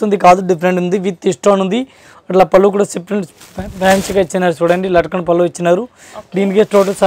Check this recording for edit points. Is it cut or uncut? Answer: uncut